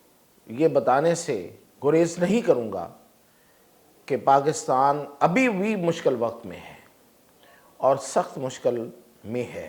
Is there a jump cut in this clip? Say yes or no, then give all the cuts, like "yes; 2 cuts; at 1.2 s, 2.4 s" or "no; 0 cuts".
no; 0 cuts